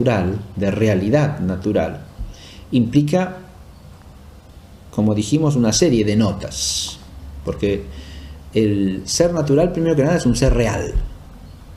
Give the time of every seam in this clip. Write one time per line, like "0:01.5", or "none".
none